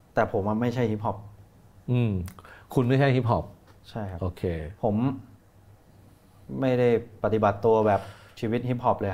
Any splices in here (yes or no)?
no